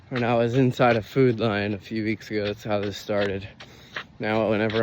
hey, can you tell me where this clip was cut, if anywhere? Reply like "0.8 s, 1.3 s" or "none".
none